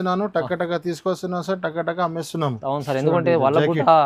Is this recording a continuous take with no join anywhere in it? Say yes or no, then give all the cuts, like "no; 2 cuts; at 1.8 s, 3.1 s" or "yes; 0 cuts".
yes; 0 cuts